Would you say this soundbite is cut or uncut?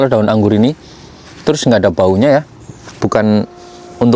cut